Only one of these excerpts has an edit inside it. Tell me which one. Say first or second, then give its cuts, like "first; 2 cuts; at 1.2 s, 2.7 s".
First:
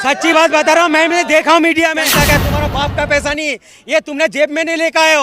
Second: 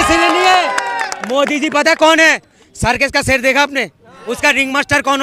first; 1 cut; at 2.1 s